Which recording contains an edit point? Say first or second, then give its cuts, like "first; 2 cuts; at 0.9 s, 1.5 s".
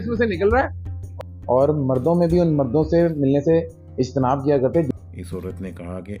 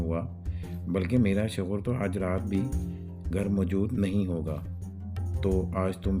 first; 2 cuts; at 1.1 s, 4.9 s